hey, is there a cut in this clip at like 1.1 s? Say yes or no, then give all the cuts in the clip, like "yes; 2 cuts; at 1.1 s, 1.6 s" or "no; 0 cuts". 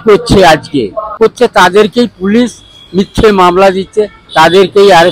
yes; 1 cut; at 1.1 s